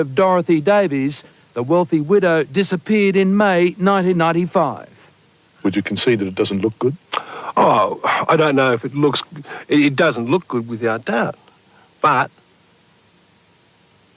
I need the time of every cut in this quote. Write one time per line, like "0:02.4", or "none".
none